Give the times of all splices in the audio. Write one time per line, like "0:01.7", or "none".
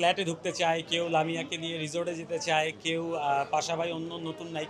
none

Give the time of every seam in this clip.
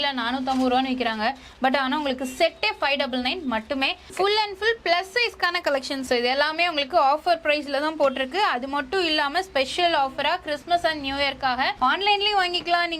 0:04.1
0:06.0
0:11.7

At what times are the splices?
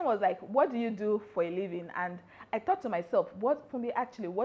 none

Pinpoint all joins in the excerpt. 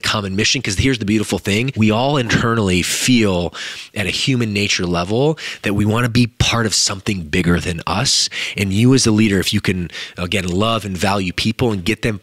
0:01.7

